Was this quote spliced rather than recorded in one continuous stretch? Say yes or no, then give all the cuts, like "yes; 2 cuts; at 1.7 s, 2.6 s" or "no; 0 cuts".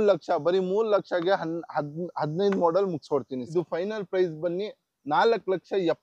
yes; 1 cut; at 3.4 s